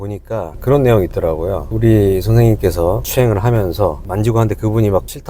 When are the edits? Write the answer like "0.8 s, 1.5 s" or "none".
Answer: none